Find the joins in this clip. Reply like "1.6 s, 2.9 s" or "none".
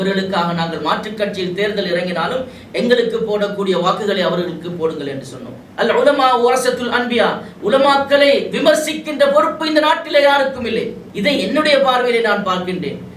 5.6 s, 11.0 s